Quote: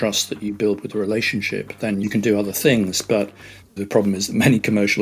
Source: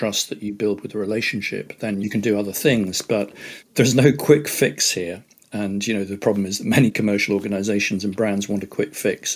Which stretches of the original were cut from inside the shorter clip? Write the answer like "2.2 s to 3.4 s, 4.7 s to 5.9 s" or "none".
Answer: 3.7 s to 6.0 s

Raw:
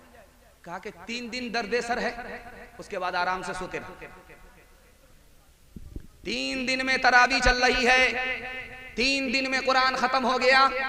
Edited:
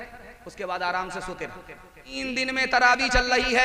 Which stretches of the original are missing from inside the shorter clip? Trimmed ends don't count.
4.4 s to 6.4 s

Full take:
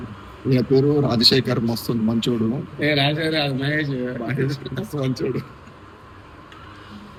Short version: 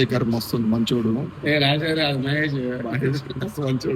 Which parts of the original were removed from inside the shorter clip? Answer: none

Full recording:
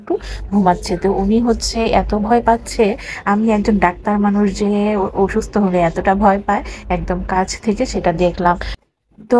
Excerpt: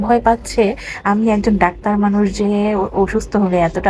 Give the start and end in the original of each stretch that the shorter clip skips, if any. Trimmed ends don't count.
none

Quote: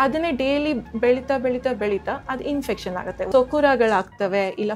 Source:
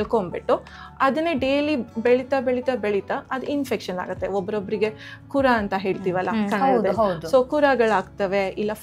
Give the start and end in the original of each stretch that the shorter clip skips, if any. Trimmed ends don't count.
4.3 s to 7.2 s

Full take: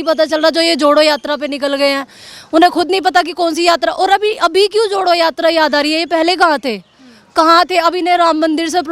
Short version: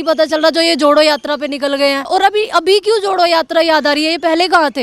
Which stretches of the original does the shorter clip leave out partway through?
2.1 s to 3.9 s

